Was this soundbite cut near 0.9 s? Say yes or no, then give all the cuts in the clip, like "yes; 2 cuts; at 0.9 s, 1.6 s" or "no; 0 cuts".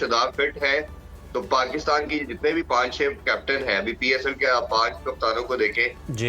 no; 0 cuts